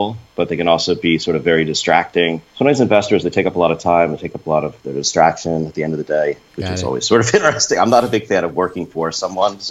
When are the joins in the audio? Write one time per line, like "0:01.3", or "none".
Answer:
0:02.4
0:06.5